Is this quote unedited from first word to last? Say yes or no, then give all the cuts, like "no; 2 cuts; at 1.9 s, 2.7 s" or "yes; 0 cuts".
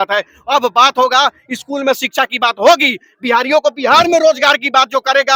yes; 0 cuts